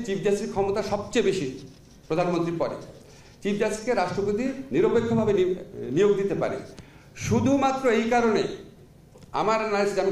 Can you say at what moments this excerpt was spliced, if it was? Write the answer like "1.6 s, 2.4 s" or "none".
none